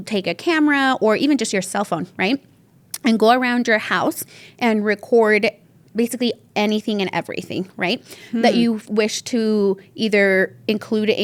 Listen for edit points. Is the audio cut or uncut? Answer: uncut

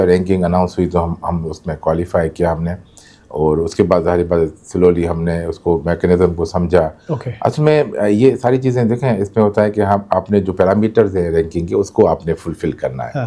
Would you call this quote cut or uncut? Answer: uncut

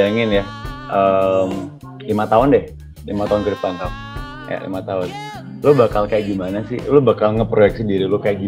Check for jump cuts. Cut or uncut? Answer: uncut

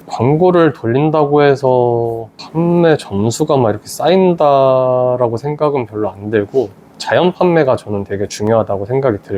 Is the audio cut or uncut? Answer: uncut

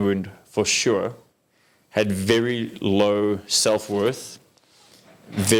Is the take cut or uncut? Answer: uncut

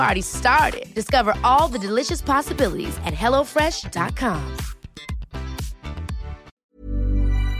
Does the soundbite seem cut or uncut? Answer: cut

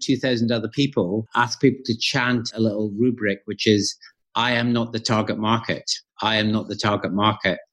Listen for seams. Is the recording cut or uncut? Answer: cut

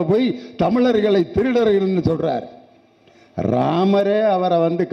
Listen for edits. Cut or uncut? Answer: uncut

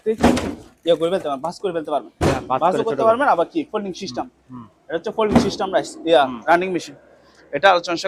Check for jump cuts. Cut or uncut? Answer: uncut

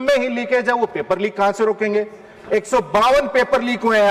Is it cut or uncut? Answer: uncut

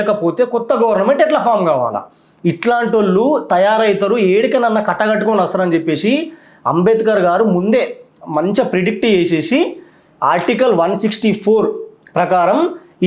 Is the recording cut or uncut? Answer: uncut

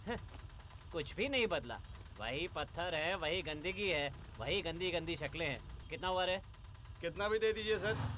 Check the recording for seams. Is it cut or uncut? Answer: cut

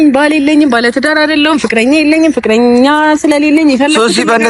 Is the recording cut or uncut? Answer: uncut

